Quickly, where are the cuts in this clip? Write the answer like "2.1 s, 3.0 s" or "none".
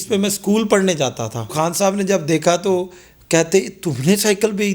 1.5 s